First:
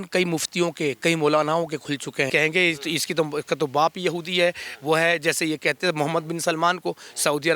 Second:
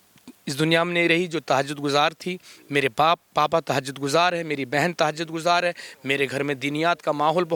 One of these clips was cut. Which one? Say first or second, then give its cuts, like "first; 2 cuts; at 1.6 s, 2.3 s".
first; 1 cut; at 2.3 s